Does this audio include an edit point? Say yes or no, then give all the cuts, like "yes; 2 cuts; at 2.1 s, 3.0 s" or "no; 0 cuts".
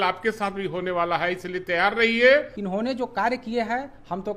yes; 1 cut; at 2.6 s